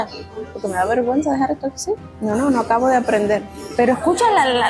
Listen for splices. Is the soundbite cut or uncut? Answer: cut